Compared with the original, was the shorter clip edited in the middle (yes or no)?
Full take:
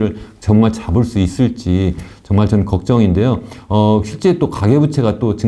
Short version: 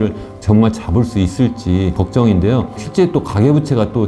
yes